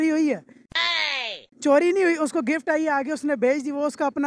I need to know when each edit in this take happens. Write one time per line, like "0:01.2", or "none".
none